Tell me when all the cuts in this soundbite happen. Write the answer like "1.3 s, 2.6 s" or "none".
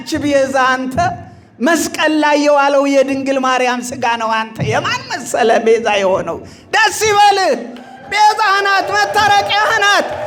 none

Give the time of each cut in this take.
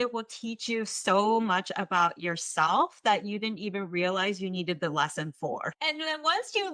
5.8 s

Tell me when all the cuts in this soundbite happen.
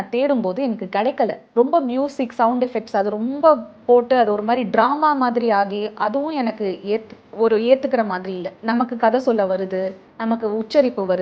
1.4 s, 8.6 s

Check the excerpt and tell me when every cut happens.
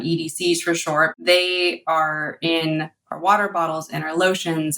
1.1 s

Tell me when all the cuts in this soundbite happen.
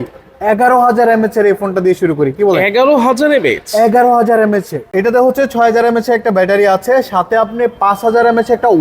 4.9 s

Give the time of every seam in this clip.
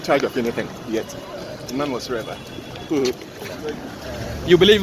3.9 s

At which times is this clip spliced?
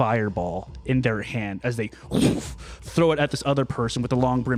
none

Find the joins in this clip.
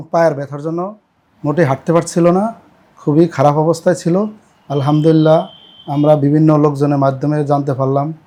none

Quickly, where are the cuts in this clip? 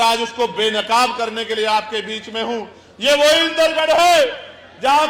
none

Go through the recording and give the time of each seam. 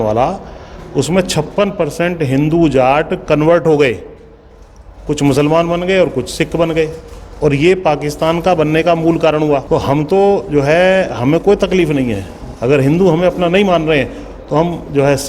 9.6 s

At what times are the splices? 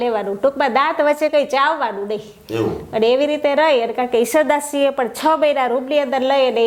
none

